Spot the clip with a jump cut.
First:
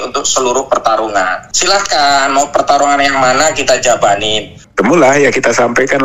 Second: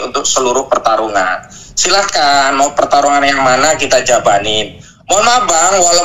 first; 2 cuts; at 1.5 s, 4.6 s

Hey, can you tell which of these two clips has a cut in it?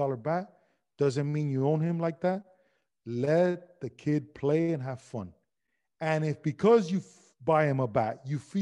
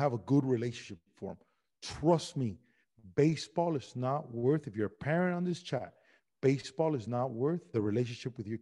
second; 1 cut; at 7.7 s

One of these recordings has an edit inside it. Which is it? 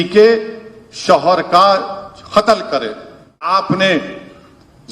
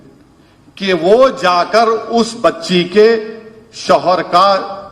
first; 1 cut; at 3.5 s

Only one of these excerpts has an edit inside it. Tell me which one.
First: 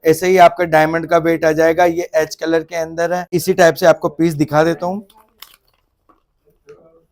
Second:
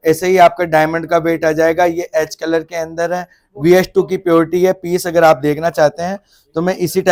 first; 1 cut; at 3.3 s

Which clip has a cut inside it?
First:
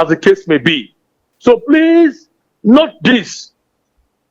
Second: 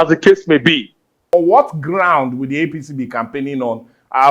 second; 1 cut; at 1.3 s

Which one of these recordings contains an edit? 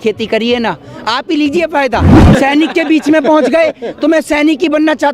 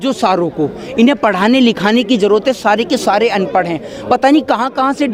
first; 1 cut; at 2.2 s

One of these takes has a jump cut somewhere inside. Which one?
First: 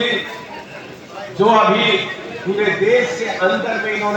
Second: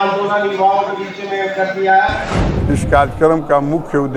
second; 1 cut; at 2.5 s

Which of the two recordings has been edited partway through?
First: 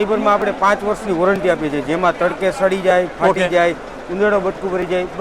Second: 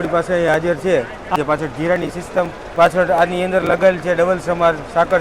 second; 2 cuts; at 1.3 s, 2.7 s

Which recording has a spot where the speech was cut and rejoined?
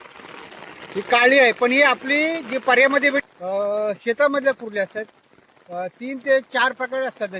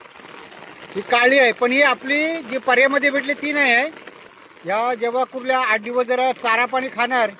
first; 1 cut; at 3.3 s

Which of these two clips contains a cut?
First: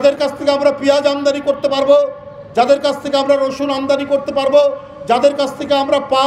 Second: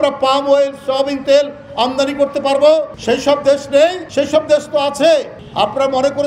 second; 2 cuts; at 2.9 s, 4.0 s

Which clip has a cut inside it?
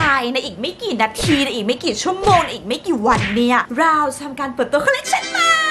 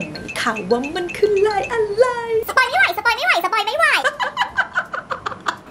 second; 2 cuts; at 2.5 s, 4.0 s

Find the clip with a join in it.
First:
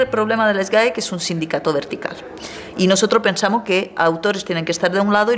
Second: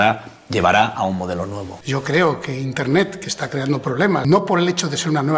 second; 2 cuts; at 1.8 s, 4.3 s

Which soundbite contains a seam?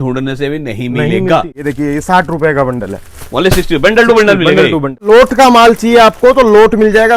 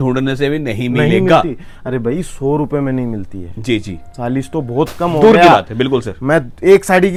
first; 2 cuts; at 1.6 s, 5.0 s

